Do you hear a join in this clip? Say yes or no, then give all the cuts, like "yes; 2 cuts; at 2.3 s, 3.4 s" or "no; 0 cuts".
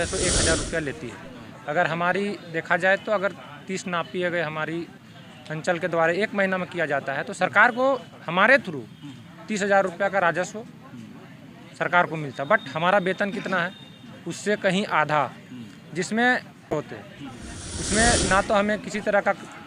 yes; 1 cut; at 16.7 s